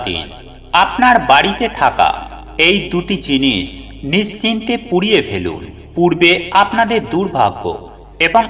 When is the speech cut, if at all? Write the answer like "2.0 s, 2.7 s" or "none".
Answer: none